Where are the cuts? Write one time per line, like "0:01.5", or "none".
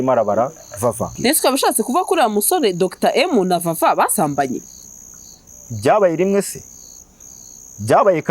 0:01.1